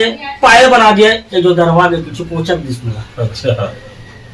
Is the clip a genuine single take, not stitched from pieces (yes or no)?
yes